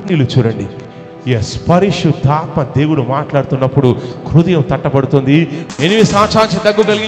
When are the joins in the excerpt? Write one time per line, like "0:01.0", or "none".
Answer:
0:05.6